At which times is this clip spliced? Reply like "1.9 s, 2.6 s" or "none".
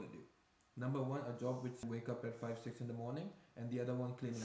1.8 s